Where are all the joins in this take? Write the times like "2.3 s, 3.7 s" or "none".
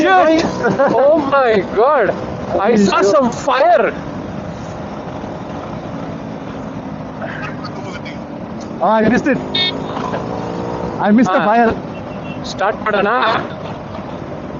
none